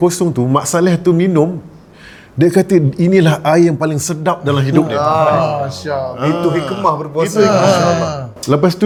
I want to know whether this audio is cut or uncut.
uncut